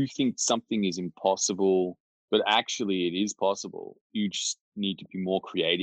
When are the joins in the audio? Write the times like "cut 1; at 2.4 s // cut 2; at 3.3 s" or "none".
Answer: none

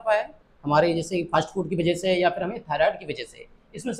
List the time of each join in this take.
none

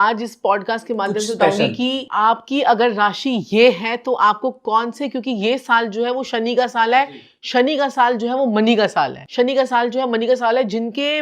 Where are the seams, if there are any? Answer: cut 1; at 2.1 s // cut 2; at 9.2 s

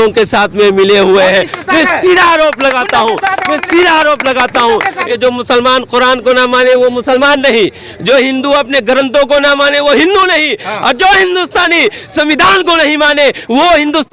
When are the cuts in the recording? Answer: cut 1; at 5.0 s

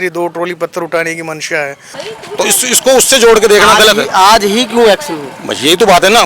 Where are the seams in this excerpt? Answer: cut 1; at 1.9 s

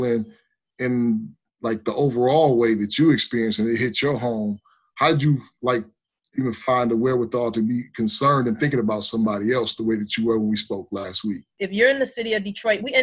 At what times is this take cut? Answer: cut 1; at 11.5 s

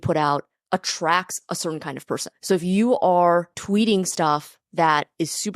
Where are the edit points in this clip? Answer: cut 1; at 2.3 s // cut 2; at 3.6 s

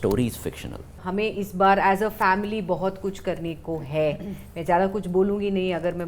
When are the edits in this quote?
cut 1; at 1.0 s

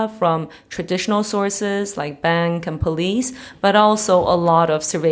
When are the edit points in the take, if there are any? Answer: none

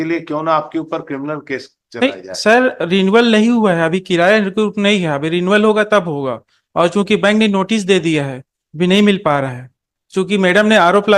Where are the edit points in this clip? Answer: none

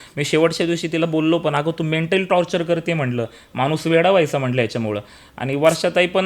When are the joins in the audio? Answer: none

